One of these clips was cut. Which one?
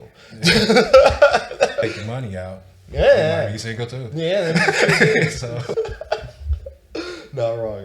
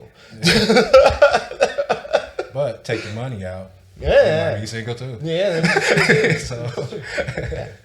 first; 2 cuts; at 1.8 s, 5.7 s

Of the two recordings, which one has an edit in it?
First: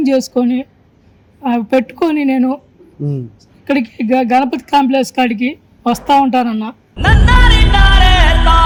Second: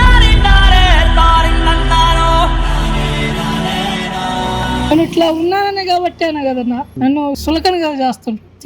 second; 1 cut; at 4.9 s

